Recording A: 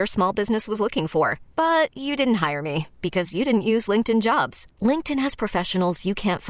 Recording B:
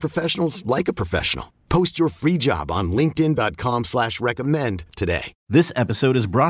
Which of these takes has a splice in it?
B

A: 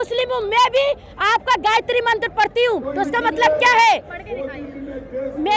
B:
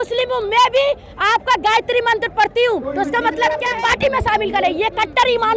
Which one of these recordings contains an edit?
B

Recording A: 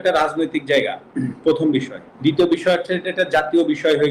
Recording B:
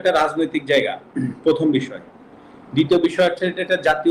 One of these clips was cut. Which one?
A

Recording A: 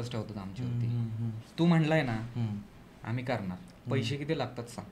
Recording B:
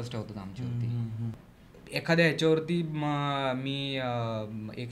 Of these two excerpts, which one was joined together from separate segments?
B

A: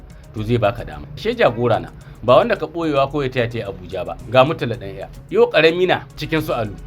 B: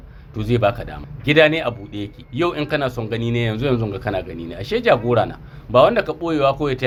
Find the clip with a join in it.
A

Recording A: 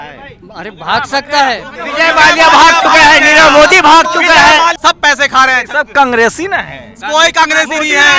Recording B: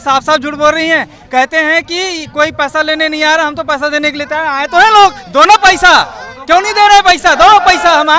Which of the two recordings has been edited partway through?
A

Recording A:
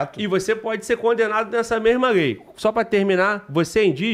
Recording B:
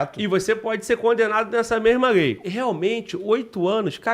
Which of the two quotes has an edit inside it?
B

